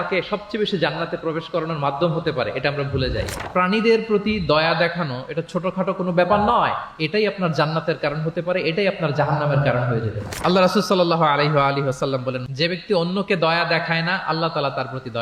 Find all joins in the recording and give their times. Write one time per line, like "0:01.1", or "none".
0:03.4
0:12.4